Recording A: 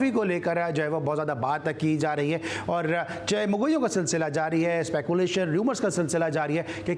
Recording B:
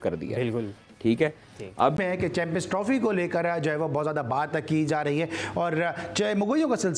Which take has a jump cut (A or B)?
B